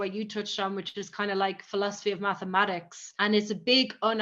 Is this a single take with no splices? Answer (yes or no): yes